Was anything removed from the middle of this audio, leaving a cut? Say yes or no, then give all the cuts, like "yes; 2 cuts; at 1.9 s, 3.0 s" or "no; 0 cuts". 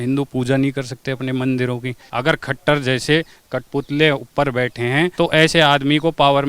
yes; 2 cuts; at 2.0 s, 5.1 s